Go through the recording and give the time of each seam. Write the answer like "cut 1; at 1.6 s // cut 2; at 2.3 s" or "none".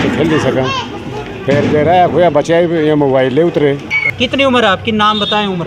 cut 1; at 3.8 s